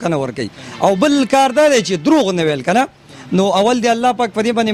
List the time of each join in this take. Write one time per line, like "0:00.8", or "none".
none